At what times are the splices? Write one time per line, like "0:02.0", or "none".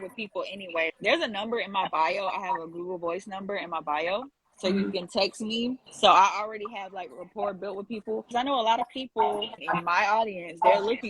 0:00.9
0:08.3
0:09.5